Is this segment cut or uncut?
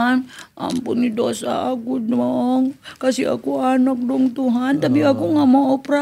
uncut